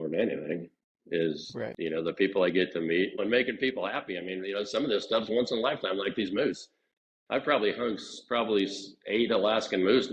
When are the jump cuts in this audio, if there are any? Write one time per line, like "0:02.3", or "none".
0:03.2